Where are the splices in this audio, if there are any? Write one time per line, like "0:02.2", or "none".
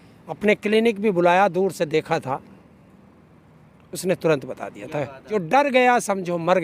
0:05.3

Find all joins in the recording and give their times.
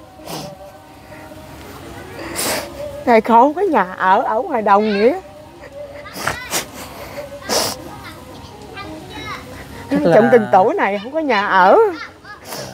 none

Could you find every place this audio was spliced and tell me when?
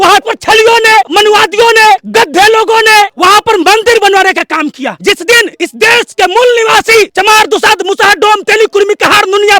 0:01.1
0:02.1
0:03.1
0:04.9
0:05.5
0:07.1

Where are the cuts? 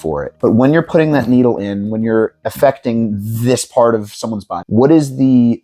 0:04.5

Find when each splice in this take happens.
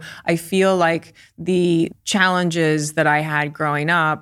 0:02.0

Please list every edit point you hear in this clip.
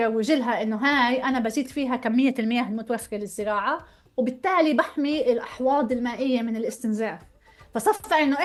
none

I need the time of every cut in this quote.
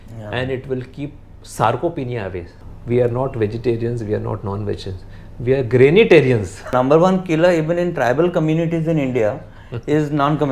0:02.5
0:06.7

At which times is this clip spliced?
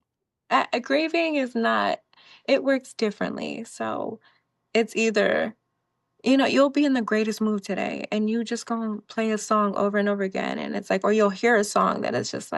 none

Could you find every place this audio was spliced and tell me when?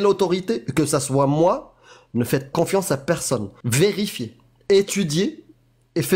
0:02.5
0:03.6

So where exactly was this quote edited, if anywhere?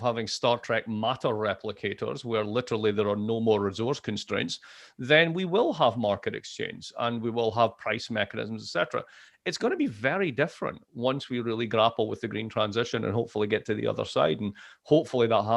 none

